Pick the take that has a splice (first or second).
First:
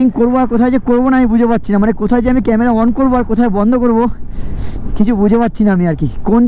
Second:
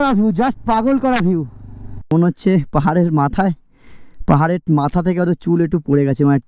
second